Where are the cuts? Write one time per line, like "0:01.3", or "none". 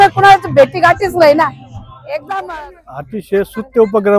0:02.5